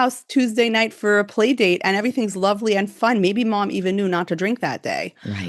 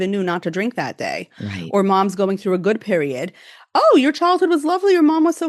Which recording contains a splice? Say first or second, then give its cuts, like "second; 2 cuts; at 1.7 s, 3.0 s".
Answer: first; 2 cuts; at 0.9 s, 2.9 s